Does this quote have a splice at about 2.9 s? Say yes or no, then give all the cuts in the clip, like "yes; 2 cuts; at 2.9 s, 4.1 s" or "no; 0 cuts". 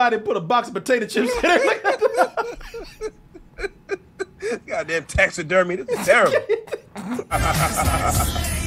no; 1 cut; at 7.3 s